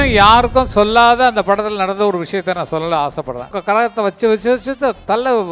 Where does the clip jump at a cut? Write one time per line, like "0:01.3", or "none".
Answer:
0:03.6